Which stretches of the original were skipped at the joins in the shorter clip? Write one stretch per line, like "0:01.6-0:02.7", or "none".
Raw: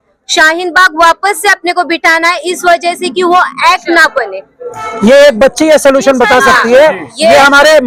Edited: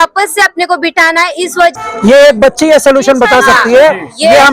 0:02.8-0:04.7

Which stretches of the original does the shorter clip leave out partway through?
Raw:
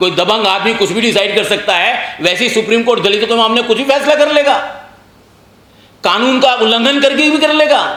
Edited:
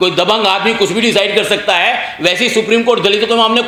none

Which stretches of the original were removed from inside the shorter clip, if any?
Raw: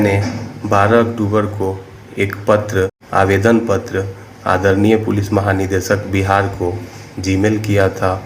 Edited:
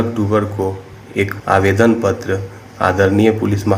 0:02.4-0:03.0

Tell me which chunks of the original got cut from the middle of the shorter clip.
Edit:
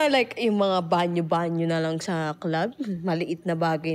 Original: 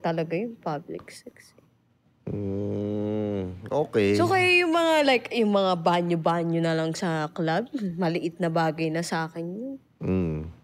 none

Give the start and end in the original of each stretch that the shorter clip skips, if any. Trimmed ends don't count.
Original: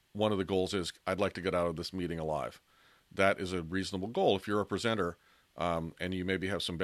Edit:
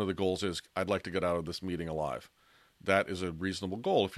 none

